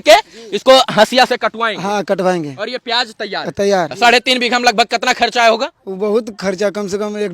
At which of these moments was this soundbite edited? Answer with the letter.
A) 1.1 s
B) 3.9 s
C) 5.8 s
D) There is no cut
B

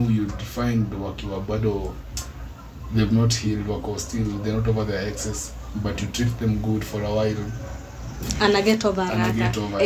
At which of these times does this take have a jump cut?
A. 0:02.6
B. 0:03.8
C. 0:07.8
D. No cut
D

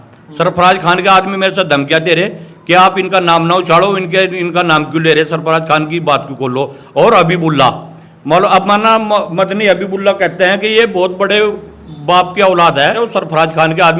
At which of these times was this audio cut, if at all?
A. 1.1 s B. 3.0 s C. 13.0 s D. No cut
C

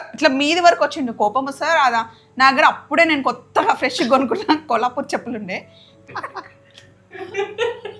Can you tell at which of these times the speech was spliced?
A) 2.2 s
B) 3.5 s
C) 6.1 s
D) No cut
C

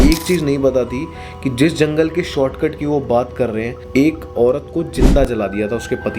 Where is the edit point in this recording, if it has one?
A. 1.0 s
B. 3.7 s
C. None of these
B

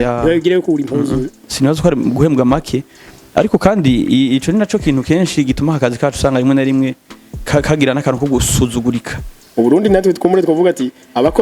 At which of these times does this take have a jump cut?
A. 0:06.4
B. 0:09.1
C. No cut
B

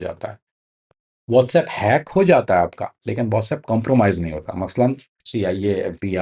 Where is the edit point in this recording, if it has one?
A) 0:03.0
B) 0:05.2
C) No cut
B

